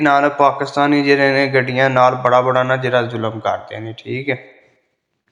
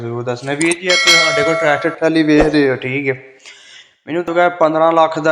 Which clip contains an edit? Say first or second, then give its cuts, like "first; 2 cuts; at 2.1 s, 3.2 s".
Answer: second; 1 cut; at 4.3 s